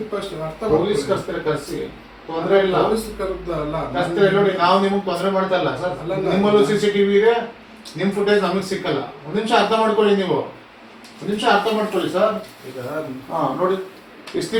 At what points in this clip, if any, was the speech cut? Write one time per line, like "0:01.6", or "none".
none

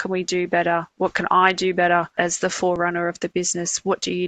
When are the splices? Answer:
0:02.1

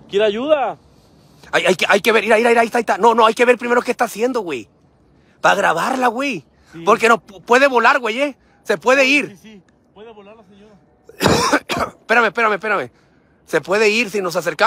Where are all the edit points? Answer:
none

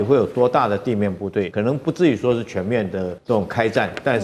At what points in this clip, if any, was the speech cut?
0:01.5
0:03.1

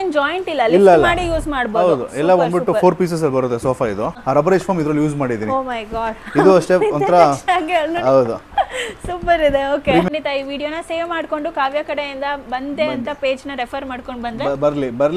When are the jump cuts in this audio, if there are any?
0:04.2
0:10.1

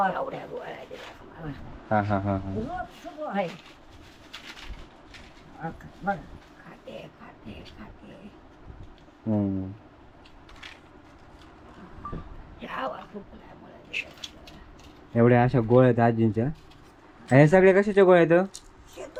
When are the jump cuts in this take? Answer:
none

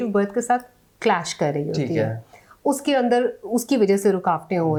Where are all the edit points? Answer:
none

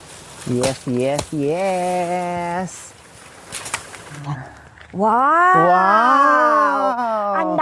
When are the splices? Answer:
0:04.2

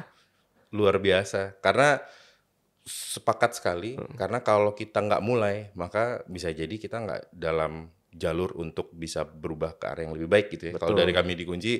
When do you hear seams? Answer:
none

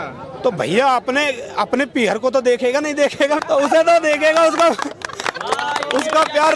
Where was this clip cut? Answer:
0:03.4

